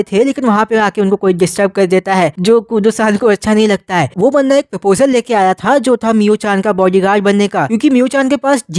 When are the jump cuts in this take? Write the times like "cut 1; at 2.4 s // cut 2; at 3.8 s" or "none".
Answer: none